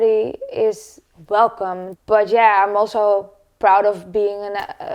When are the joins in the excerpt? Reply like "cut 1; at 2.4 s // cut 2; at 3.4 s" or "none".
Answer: cut 1; at 1.8 s